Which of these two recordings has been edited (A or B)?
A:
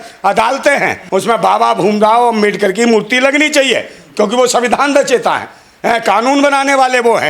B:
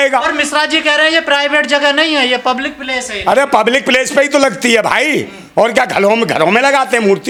A